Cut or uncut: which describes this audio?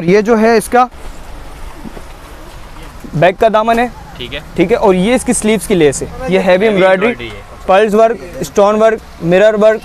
cut